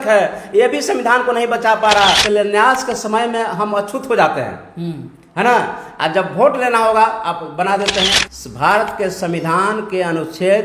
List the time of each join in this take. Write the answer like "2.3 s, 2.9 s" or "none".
2.2 s, 8.2 s